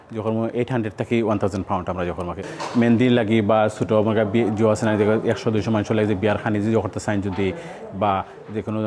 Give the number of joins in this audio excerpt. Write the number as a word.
one